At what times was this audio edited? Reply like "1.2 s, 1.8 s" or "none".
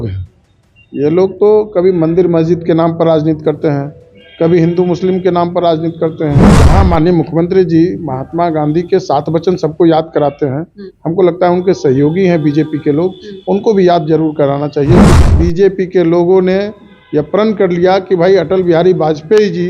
6.5 s, 15.1 s